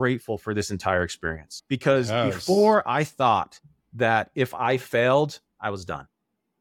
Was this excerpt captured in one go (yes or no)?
no